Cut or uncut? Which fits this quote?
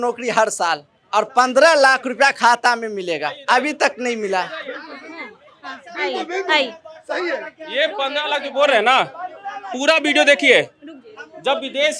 uncut